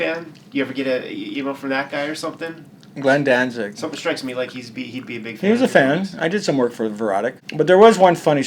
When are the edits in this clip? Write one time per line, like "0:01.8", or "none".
0:07.4